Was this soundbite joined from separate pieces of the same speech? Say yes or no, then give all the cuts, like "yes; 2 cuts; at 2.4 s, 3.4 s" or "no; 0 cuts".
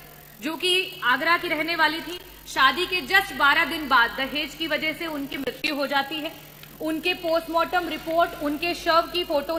no; 0 cuts